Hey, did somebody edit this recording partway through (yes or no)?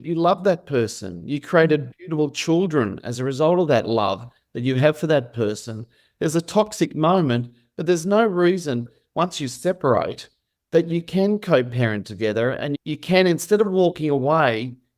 yes